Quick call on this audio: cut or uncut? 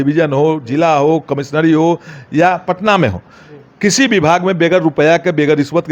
uncut